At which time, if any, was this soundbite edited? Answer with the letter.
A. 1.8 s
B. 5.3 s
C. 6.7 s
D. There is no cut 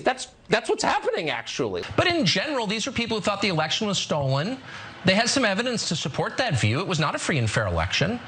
A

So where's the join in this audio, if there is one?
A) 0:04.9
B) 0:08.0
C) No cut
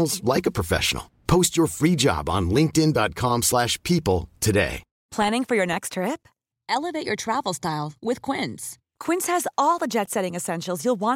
A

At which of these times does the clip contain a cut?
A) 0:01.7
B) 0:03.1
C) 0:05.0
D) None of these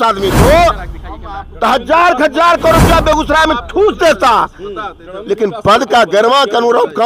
D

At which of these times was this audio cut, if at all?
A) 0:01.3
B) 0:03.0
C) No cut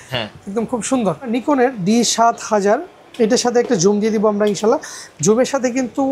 A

